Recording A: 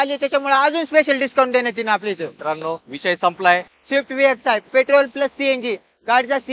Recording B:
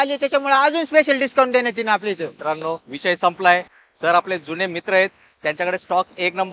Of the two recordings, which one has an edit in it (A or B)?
A